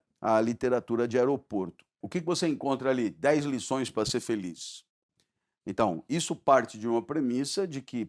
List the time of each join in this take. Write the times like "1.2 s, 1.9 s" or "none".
2.0 s